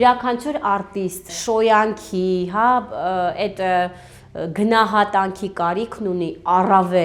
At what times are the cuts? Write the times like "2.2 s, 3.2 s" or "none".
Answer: 1.4 s

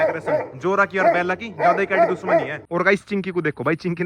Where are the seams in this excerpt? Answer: 2.6 s

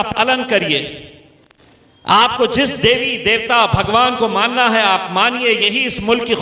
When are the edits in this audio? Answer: none

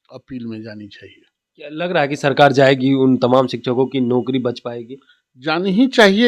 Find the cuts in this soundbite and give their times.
none

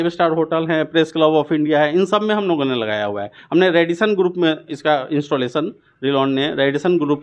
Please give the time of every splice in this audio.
none

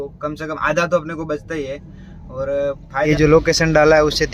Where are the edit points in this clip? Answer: 3.1 s

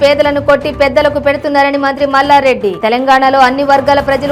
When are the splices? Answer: none

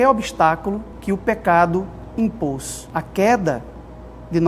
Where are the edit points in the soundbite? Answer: 0.9 s, 2.7 s

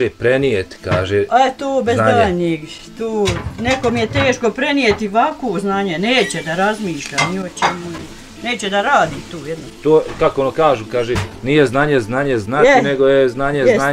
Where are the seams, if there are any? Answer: none

